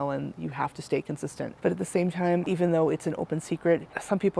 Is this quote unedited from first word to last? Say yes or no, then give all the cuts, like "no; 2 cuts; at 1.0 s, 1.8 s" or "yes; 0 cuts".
no; 2 cuts; at 1.5 s, 2.5 s